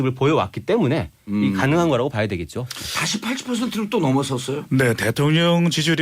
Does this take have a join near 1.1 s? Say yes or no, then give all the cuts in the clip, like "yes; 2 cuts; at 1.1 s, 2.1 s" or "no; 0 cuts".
yes; 1 cut; at 1.1 s